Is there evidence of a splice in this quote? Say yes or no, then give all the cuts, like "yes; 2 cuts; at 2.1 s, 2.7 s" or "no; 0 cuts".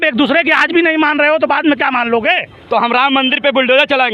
yes; 1 cut; at 2.5 s